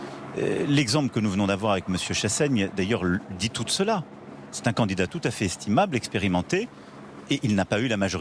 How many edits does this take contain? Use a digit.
0